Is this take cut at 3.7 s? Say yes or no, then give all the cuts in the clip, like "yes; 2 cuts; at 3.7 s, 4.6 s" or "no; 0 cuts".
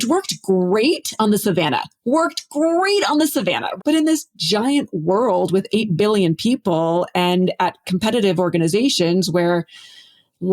yes; 1 cut; at 3.7 s